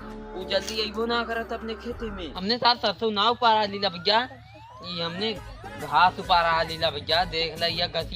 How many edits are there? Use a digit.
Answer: 1